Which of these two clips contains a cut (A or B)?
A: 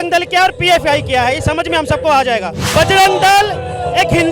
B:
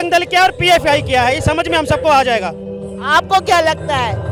A